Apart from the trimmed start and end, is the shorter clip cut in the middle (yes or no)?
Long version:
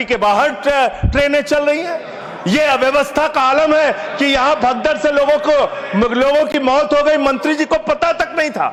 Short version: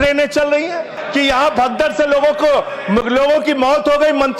yes